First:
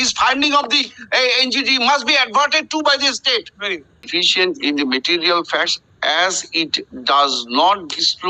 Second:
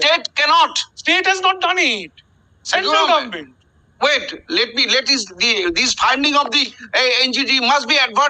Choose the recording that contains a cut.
first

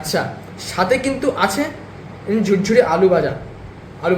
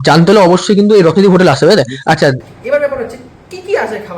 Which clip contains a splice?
second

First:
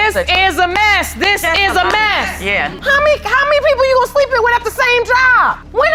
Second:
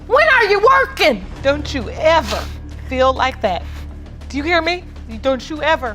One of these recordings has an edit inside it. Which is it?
second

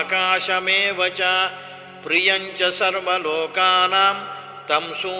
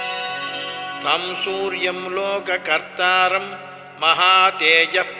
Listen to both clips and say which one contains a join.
second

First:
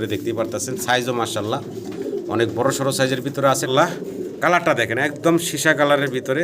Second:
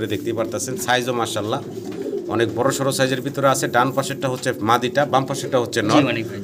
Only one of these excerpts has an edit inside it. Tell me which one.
first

